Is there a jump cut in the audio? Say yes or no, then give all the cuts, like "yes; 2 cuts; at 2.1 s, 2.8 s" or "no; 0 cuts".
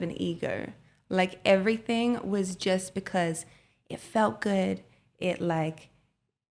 no; 0 cuts